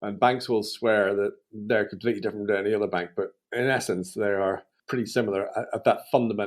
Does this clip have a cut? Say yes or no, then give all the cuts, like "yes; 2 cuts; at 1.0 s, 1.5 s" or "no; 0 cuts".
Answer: yes; 1 cut; at 4.8 s